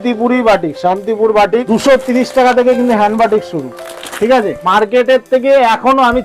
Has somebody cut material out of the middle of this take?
yes; 2 cuts; at 1.6 s, 4.6 s

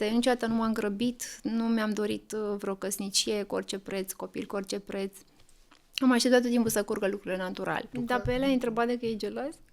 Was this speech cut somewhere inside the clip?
yes; 1 cut; at 7.9 s

